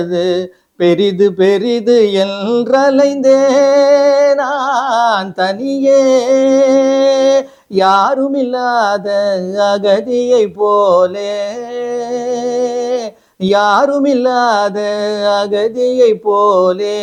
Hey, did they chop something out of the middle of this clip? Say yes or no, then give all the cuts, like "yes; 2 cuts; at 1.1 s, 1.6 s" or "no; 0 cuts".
no; 0 cuts